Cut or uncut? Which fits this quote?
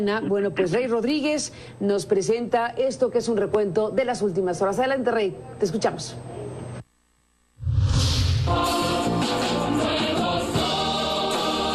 uncut